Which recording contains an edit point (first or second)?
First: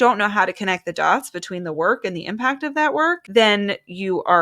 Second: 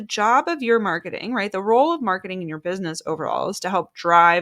first